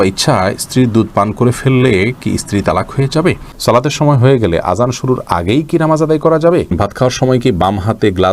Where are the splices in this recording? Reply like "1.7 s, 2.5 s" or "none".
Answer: 3.5 s, 6.7 s